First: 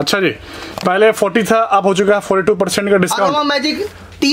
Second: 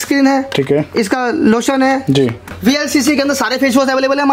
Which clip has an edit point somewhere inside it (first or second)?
second